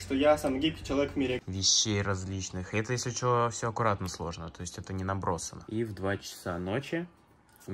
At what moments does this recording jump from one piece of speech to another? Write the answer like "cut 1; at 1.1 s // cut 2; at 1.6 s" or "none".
cut 1; at 1.4 s // cut 2; at 5.6 s